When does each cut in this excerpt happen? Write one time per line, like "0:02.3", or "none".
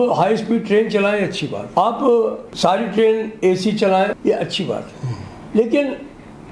0:01.6
0:02.5
0:04.2